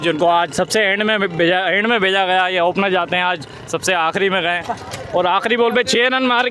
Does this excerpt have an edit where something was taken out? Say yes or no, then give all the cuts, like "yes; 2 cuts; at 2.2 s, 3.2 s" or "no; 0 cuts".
no; 0 cuts